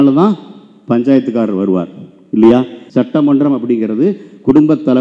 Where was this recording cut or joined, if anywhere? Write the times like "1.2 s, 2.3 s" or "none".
2.8 s